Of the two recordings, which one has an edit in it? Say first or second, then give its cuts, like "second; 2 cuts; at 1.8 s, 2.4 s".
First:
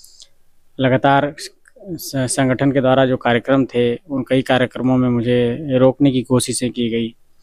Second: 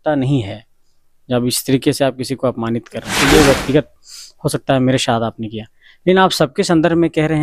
second; 1 cut; at 3.1 s